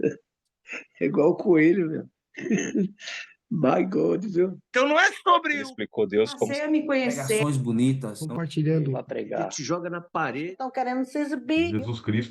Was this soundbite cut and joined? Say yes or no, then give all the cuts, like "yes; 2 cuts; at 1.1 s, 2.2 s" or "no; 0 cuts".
yes; 1 cut; at 4.6 s